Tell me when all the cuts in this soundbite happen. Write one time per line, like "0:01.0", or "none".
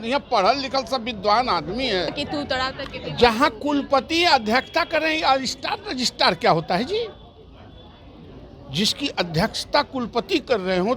0:02.1

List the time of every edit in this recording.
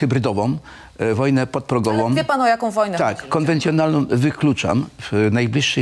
none

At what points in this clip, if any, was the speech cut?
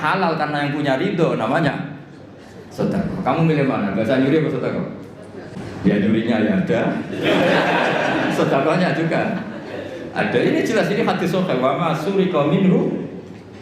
0:05.5

